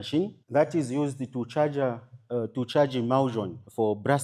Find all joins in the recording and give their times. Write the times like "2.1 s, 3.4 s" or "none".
none